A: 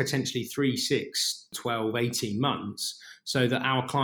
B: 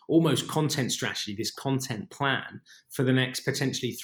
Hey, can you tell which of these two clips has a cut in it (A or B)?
A